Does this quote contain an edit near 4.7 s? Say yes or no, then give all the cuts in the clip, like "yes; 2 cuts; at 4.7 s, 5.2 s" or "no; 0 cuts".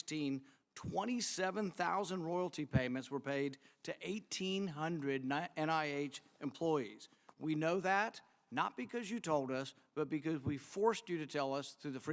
no; 0 cuts